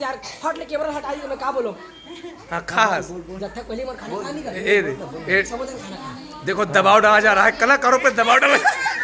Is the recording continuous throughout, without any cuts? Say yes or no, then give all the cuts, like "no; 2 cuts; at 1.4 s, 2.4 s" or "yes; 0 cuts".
yes; 0 cuts